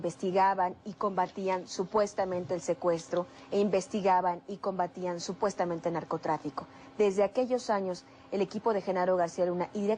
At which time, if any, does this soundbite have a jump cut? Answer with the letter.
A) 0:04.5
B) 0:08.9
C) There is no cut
C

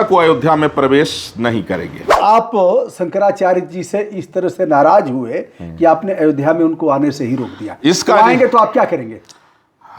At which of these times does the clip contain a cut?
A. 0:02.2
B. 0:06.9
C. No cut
A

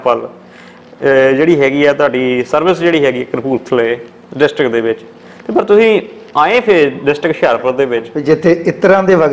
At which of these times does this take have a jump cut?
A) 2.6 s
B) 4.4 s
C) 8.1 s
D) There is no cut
C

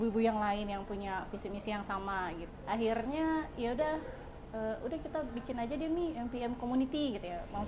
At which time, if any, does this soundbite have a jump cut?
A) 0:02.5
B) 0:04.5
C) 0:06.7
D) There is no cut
A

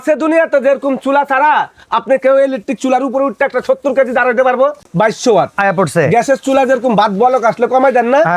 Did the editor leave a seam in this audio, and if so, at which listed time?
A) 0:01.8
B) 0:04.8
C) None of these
B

